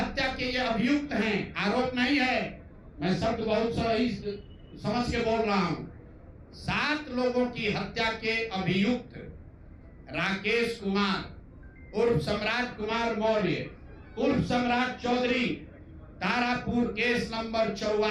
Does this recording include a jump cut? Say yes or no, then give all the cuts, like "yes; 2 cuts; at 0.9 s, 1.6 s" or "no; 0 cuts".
no; 0 cuts